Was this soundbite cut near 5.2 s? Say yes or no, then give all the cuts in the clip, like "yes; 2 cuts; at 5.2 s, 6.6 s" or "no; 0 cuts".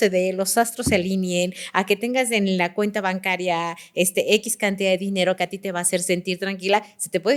no; 0 cuts